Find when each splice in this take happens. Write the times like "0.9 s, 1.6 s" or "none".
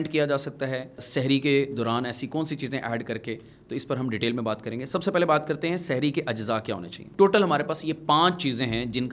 1.0 s, 7.0 s